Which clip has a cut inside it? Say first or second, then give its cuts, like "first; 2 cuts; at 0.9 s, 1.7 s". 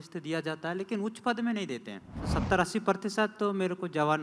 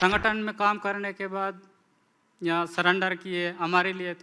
first; 1 cut; at 2.3 s